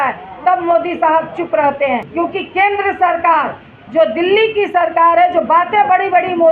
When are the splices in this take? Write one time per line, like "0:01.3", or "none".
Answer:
0:02.1